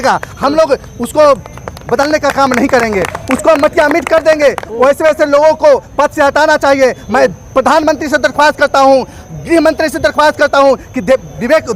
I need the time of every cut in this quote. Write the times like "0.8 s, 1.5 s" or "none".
none